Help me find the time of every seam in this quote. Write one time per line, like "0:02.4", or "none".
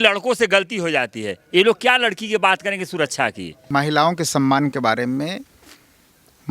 0:03.5